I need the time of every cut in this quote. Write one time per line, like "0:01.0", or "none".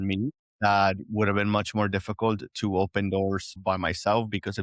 0:03.5